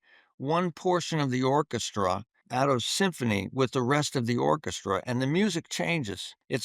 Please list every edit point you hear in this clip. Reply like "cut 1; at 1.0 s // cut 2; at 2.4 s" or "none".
cut 1; at 2.3 s